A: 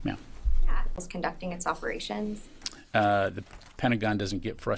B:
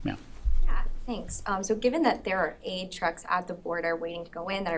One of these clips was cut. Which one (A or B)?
B